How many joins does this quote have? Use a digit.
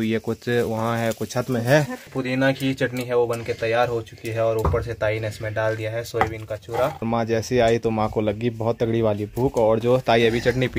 2